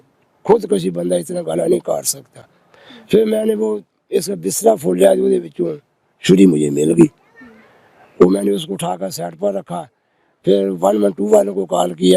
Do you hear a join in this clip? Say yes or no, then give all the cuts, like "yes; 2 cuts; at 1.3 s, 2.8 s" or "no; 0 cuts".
no; 0 cuts